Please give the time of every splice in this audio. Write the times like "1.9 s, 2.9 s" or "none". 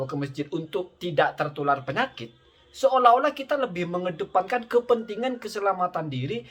none